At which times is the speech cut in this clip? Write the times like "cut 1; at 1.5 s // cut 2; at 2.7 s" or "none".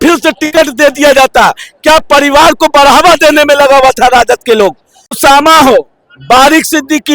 cut 1; at 5.2 s